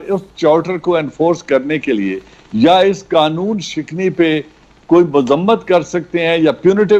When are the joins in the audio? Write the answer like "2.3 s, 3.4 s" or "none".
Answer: none